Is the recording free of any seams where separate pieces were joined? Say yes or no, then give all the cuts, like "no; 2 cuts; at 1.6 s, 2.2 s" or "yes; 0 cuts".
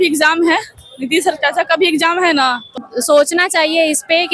no; 1 cut; at 2.8 s